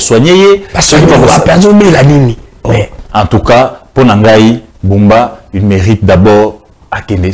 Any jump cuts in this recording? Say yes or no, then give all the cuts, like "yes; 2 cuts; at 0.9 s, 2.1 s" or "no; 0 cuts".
yes; 1 cut; at 2.9 s